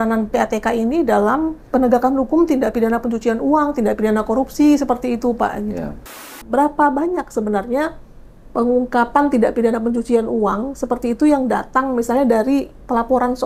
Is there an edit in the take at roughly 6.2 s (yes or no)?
yes